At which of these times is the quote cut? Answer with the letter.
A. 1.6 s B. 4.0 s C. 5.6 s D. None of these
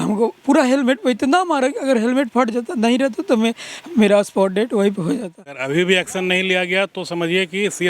C